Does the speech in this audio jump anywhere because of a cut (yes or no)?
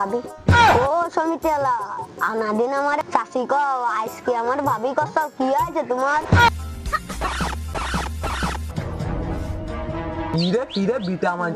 yes